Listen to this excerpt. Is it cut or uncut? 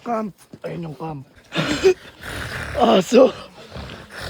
cut